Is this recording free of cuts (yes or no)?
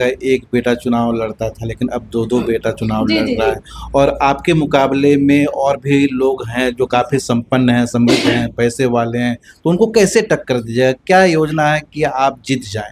yes